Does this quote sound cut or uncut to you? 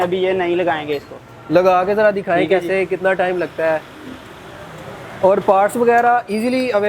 uncut